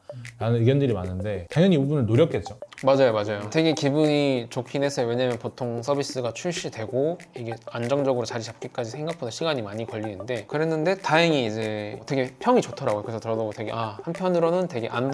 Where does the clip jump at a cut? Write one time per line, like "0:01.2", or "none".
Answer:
0:01.4
0:03.4
0:10.4